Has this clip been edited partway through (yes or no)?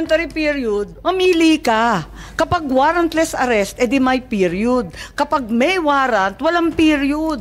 yes